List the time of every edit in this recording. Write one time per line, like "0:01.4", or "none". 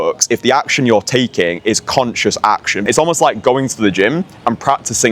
0:02.8

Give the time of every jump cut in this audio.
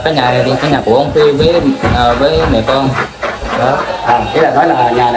none

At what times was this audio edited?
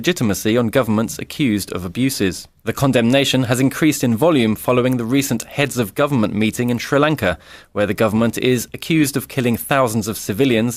0:07.5

